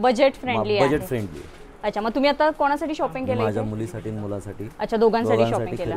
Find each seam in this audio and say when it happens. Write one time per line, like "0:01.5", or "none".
none